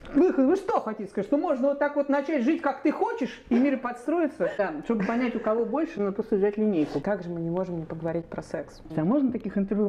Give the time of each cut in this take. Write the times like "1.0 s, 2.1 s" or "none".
4.6 s, 7.0 s, 8.9 s